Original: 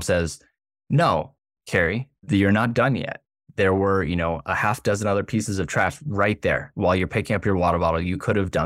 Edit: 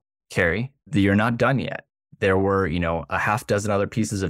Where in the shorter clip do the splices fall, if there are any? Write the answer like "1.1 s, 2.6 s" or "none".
none